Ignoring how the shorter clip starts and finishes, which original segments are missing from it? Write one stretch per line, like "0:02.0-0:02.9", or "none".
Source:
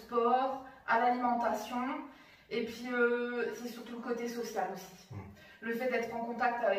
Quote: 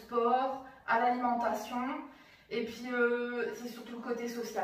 none